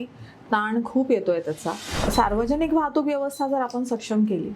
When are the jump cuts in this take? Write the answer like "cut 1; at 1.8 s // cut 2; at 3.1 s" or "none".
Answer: cut 1; at 1.9 s